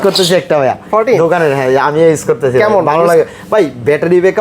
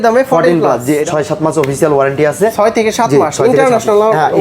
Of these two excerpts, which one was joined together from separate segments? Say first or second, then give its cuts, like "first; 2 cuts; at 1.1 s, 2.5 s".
second; 1 cut; at 1.0 s